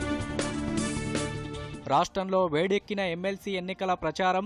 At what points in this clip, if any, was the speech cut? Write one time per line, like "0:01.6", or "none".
0:01.5